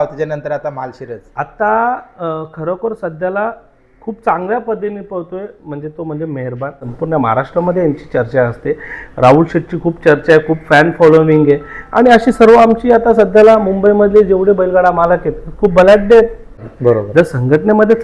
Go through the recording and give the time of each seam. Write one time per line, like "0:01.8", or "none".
0:06.9
0:16.6